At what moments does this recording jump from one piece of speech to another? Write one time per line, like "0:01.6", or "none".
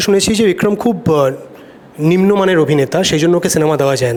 none